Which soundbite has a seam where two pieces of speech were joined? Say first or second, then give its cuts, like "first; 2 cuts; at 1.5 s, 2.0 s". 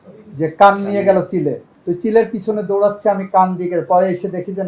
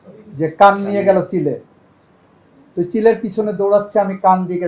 first; 1 cut; at 1.7 s